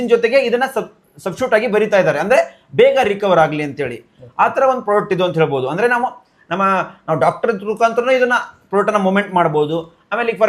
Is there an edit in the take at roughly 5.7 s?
no; 0 cuts

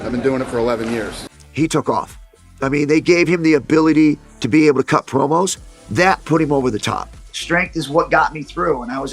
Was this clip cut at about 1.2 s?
no; 0 cuts

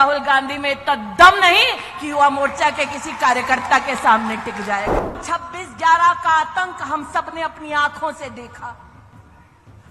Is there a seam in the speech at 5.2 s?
yes; 1 cut; at 5.2 s

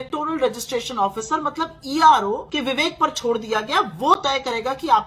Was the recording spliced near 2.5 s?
yes; 1 cut; at 2.5 s

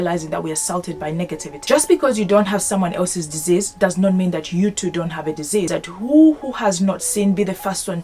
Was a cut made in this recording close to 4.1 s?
no; 2 cuts; at 1.5 s, 5.7 s

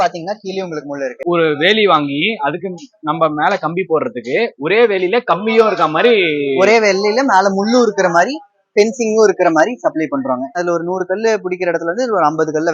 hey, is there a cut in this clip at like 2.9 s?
no; 2 cuts; at 1.2 s, 10.6 s

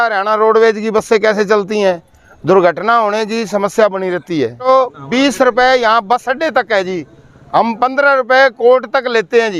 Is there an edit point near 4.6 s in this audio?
yes; 1 cut; at 4.6 s

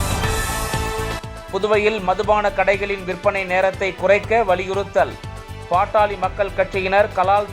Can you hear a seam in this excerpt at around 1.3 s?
yes; 1 cut; at 1.3 s

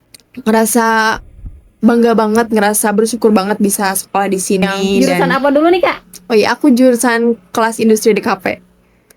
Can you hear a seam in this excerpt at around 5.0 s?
yes; 1 cut; at 5.0 s

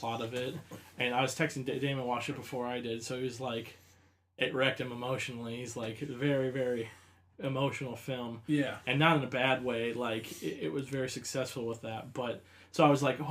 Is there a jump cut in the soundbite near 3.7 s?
no; 1 cut; at 6.9 s

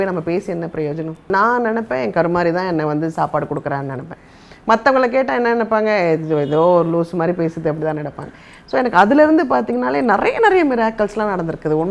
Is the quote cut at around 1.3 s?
yes; 1 cut; at 1.3 s

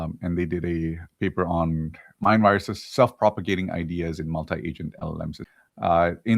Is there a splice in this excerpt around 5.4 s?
yes; 2 cuts; at 3.4 s, 5.4 s

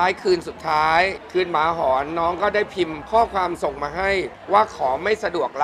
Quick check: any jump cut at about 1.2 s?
yes; 3 cuts; at 1.2 s, 3.0 s, 4.4 s

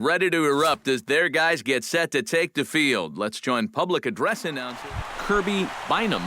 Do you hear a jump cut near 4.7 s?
yes; 1 cut; at 4.7 s

